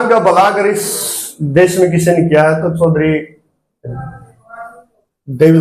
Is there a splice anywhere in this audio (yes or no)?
no